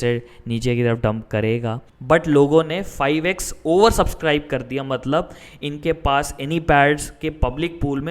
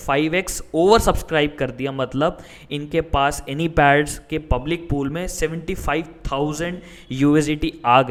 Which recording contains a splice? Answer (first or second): first